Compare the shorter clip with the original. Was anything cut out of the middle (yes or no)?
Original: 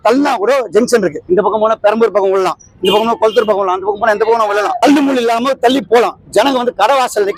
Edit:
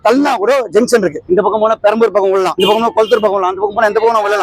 yes